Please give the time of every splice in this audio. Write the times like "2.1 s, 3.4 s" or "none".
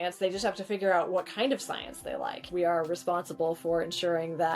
2.5 s